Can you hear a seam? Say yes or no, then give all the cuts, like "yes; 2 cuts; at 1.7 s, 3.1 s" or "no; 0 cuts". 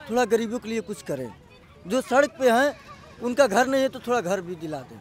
no; 0 cuts